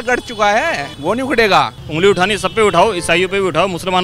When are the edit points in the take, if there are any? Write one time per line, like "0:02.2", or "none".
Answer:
0:00.9
0:01.8